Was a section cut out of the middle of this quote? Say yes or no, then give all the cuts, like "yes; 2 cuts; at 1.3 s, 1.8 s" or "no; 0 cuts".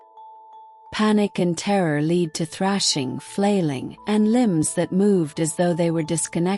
yes; 1 cut; at 0.9 s